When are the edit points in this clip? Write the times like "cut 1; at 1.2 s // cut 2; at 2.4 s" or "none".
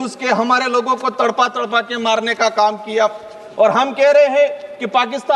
none